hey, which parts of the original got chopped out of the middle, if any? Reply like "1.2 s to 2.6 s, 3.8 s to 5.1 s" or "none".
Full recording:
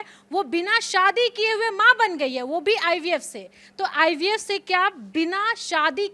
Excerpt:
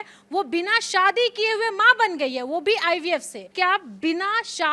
3.5 s to 4.6 s